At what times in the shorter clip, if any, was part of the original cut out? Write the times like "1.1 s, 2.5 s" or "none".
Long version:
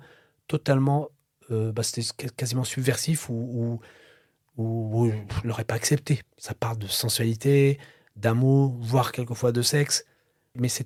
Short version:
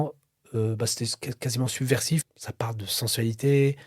2.3 s